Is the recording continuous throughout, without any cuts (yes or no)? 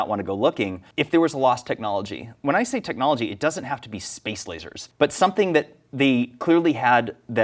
no